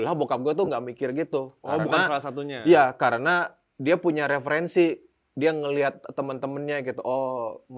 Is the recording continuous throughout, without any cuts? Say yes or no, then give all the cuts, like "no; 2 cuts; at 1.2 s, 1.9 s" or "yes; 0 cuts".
yes; 0 cuts